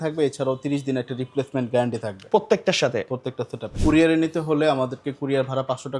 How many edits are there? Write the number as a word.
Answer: one